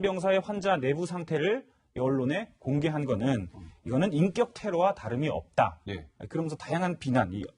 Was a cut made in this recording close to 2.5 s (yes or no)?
no